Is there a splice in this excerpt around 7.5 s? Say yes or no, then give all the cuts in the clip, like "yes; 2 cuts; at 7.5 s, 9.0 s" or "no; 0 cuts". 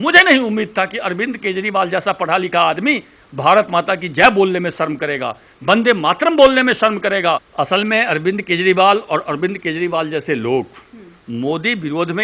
yes; 1 cut; at 7.5 s